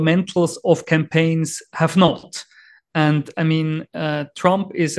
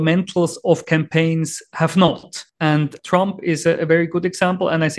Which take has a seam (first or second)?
second